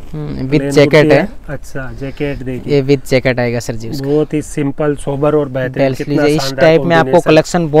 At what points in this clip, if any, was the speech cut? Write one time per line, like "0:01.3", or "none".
none